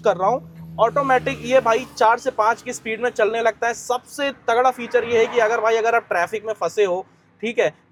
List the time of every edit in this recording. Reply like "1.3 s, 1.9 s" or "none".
none

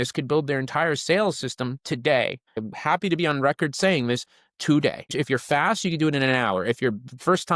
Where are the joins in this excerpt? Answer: 2.6 s, 5.1 s

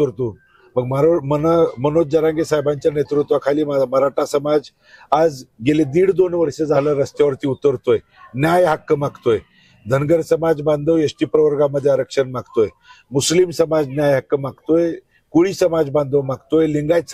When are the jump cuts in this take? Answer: none

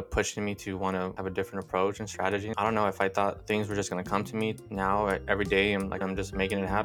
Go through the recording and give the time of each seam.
1.2 s, 2.5 s, 3.4 s, 4.6 s, 6.0 s

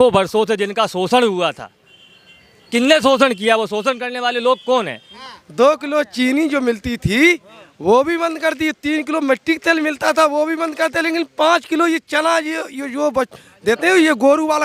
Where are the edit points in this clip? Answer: 5.1 s

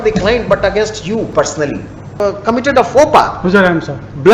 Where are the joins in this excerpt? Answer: 2.1 s

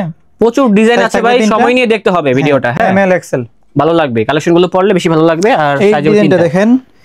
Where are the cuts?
none

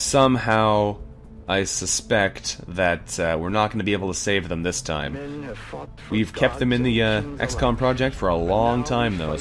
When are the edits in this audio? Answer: 4.6 s

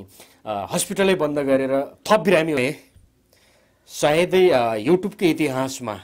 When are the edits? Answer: 2.6 s

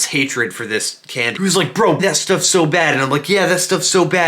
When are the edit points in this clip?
2.0 s

